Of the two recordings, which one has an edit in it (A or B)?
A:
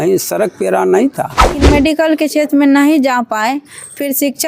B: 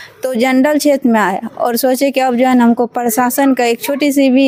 A